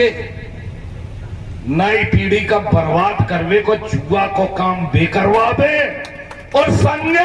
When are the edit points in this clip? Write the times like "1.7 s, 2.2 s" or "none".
none

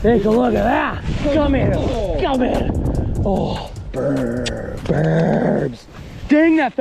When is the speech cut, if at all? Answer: 1.1 s

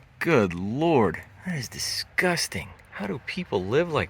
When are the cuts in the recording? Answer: none

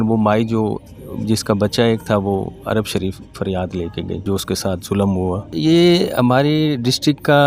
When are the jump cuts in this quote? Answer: 4.2 s, 5.5 s

